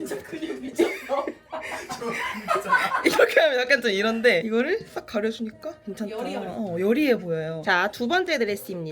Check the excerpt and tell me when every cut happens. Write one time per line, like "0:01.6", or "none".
none